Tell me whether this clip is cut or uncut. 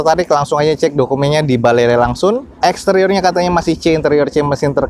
uncut